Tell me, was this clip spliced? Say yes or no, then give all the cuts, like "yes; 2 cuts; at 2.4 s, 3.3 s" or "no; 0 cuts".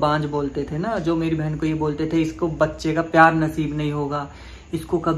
no; 0 cuts